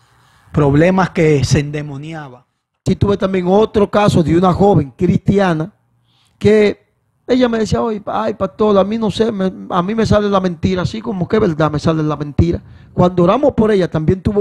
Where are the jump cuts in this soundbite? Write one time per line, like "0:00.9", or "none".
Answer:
0:02.8